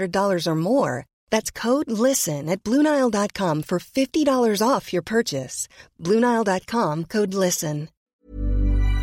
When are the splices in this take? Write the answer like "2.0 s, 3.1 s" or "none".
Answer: 7.9 s